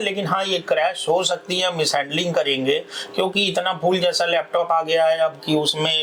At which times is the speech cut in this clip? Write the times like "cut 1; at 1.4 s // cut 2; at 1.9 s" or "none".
none